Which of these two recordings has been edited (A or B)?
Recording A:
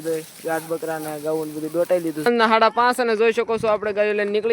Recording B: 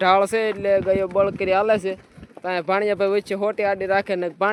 A